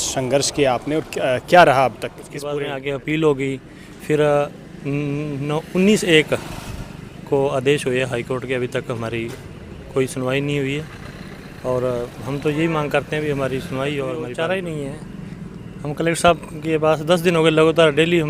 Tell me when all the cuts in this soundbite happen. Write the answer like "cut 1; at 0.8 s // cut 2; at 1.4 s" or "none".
cut 1; at 2.5 s // cut 2; at 14.2 s